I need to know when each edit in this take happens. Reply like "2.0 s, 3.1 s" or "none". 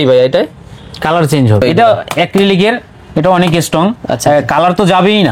1.6 s